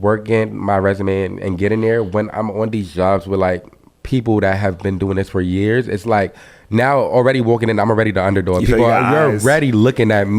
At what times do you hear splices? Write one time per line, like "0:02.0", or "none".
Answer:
none